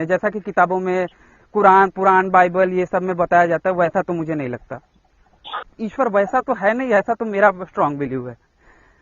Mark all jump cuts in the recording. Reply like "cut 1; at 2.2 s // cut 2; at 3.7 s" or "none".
cut 1; at 5.7 s